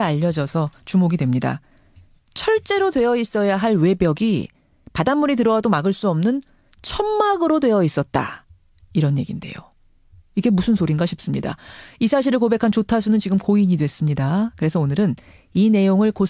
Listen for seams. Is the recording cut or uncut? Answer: cut